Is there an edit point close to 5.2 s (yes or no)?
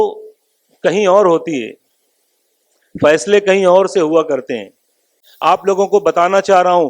yes